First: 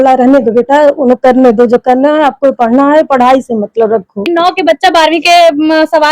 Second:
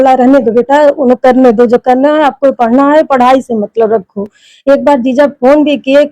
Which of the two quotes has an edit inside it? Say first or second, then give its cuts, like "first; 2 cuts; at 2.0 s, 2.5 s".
first; 1 cut; at 4.3 s